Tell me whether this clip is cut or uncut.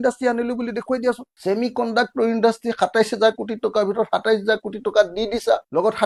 uncut